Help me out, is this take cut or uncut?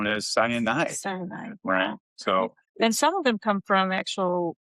cut